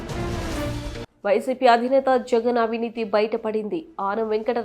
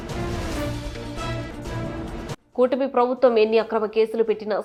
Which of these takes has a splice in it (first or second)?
first